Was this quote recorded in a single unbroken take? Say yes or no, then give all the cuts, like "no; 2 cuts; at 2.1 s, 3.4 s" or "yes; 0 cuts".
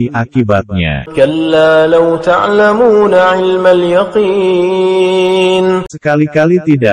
no; 2 cuts; at 1.0 s, 5.9 s